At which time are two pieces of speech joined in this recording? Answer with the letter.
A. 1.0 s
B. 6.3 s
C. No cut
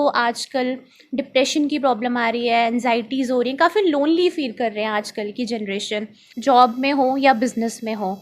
B